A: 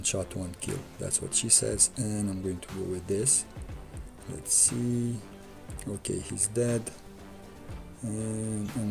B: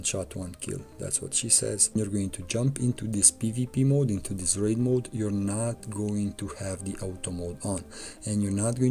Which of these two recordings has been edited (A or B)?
B